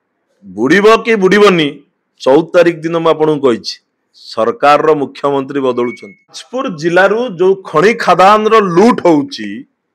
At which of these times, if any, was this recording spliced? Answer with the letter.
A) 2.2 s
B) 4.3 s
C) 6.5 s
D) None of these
C